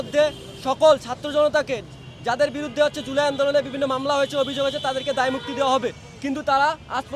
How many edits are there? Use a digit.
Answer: 0